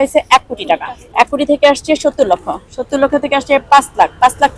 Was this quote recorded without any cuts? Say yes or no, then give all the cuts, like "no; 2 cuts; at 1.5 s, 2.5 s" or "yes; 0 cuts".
no; 1 cut; at 1.0 s